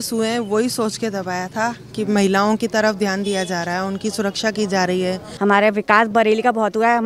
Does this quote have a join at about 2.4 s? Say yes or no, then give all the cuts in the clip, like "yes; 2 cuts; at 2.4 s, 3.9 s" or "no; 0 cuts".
no; 1 cut; at 5.3 s